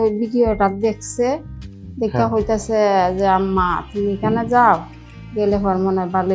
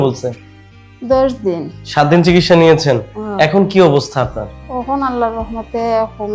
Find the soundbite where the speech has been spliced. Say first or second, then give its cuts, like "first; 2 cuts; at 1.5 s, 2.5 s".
second; 1 cut; at 1.8 s